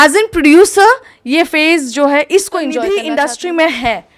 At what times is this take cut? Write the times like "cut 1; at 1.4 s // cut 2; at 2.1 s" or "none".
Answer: cut 1; at 2.8 s